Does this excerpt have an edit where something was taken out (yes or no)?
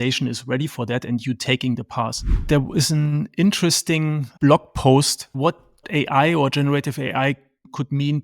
yes